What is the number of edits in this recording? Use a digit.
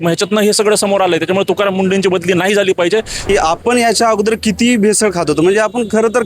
1